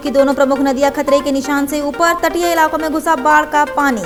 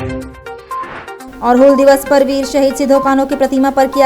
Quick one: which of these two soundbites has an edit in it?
second; 1 cut; at 1.2 s

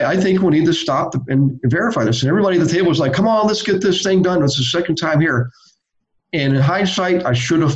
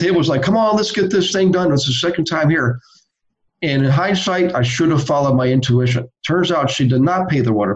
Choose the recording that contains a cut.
first; 1 cut; at 1.5 s

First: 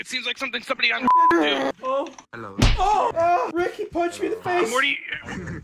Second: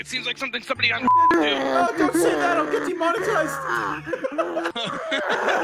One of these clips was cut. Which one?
first; 2 cuts; at 1.7 s, 3.3 s

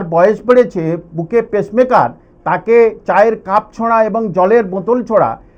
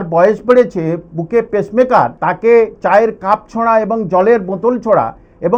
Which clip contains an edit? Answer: second; 1 cut; at 2.2 s

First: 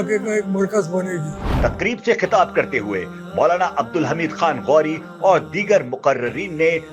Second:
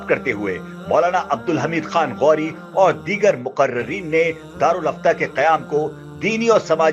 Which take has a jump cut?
first; 1 cut; at 1.5 s

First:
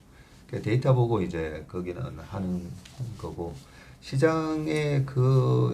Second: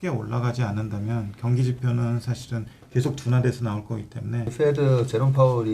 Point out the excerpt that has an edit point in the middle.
second; 1 cut; at 4.5 s

